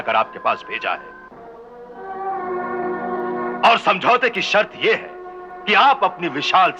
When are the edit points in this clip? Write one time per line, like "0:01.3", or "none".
none